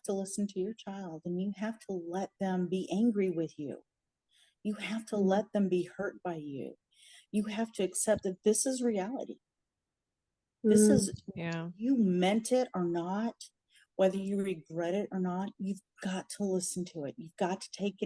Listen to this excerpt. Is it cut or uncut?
uncut